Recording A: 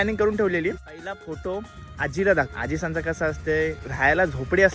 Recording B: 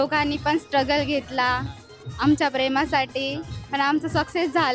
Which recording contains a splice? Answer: A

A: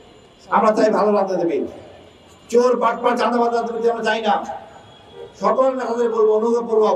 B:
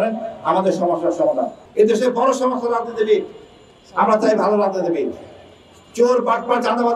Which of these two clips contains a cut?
B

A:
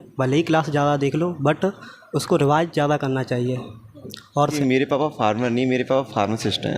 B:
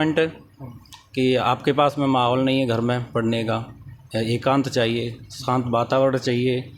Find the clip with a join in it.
A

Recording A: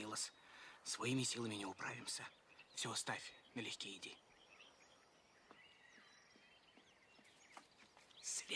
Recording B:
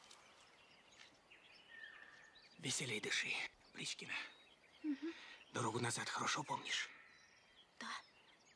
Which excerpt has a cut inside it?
B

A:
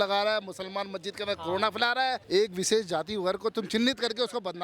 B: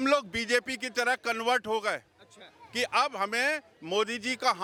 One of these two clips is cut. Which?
A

